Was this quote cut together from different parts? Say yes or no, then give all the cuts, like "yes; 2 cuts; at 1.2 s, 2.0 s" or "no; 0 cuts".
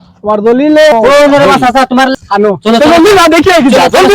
yes; 2 cuts; at 0.9 s, 2.1 s